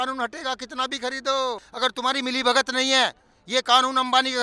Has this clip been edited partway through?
yes; 1 cut; at 1.7 s

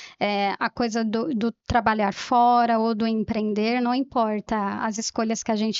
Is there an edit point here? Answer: no; 0 cuts

